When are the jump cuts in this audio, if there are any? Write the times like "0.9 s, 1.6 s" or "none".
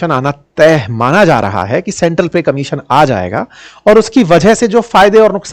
none